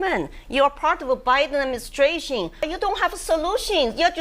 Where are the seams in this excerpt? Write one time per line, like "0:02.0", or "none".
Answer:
0:02.6